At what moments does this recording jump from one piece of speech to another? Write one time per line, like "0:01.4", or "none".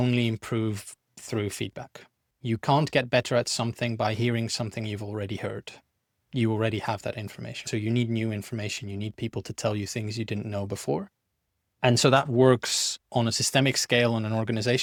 none